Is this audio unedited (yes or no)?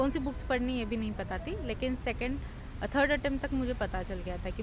yes